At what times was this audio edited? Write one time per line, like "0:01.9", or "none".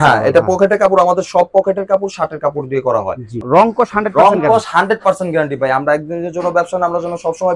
0:03.3